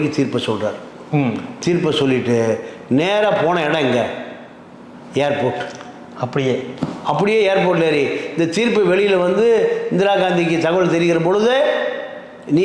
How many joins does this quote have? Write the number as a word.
zero